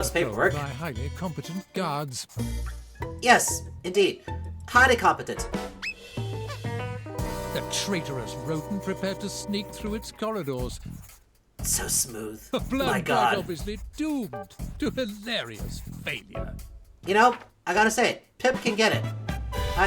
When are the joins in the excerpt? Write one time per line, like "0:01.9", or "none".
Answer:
0:16.9